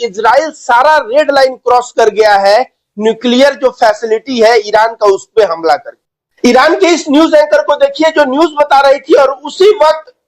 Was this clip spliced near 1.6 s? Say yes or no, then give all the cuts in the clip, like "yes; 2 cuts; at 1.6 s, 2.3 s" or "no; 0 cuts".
no; 1 cut; at 6.2 s